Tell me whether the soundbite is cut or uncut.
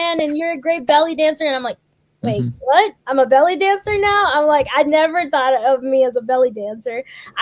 uncut